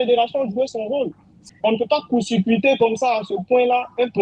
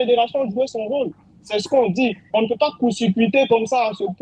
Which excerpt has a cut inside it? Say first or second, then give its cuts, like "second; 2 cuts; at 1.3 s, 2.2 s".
first; 1 cut; at 1.5 s